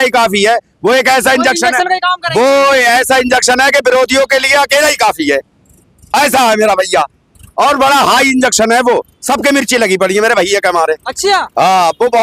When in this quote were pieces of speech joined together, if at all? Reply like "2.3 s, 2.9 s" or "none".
none